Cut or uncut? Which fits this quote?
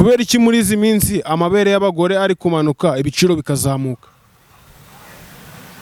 uncut